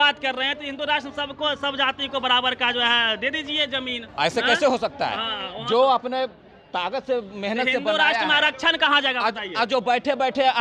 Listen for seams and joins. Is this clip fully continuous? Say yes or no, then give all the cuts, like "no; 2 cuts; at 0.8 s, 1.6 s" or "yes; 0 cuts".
no; 1 cut; at 4.0 s